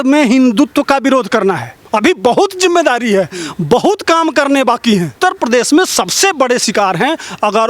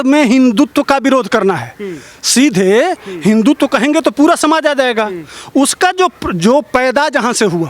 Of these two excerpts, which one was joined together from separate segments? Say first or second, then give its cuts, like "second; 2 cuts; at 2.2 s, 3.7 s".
first; 2 cuts; at 1.7 s, 5.1 s